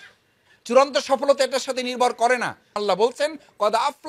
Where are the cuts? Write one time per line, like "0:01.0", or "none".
0:02.7